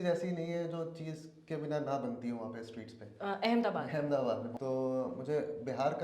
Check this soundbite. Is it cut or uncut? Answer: cut